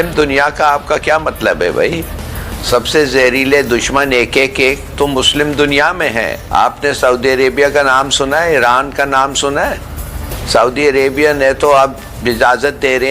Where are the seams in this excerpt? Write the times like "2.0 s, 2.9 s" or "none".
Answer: 6.4 s